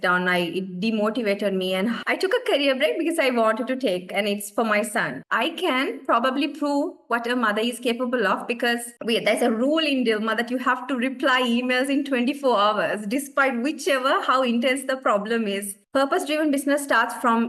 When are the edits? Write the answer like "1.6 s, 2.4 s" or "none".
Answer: 2.0 s, 5.2 s, 8.9 s, 15.8 s